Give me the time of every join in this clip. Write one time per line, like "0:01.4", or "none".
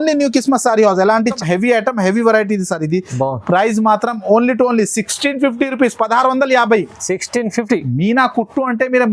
0:01.3